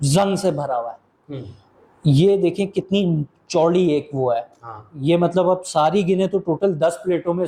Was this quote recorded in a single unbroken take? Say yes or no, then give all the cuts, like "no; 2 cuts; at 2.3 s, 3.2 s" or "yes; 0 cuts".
yes; 0 cuts